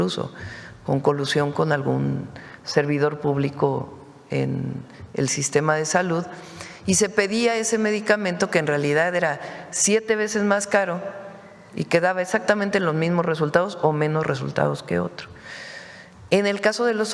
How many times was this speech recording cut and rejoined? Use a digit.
0